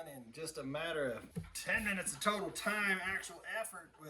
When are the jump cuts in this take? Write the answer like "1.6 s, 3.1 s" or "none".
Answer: 1.3 s